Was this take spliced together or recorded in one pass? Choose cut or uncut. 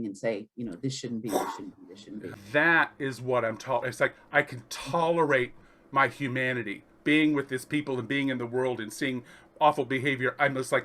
cut